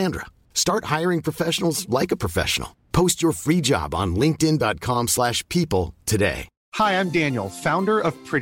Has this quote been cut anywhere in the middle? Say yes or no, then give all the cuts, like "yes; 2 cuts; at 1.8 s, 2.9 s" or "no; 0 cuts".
yes; 1 cut; at 6.5 s